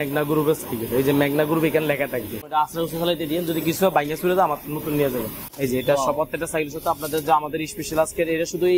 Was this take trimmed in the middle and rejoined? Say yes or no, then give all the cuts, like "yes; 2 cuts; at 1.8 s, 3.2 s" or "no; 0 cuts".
yes; 2 cuts; at 2.5 s, 5.4 s